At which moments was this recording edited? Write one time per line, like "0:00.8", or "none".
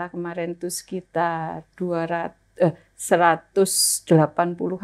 none